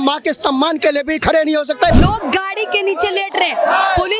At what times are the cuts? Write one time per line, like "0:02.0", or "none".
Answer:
0:01.9